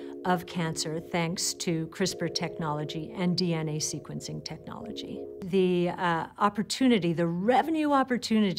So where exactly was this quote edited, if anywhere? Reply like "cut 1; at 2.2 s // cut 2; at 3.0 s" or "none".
cut 1; at 5.3 s